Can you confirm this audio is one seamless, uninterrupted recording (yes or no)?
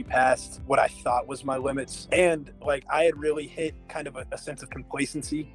yes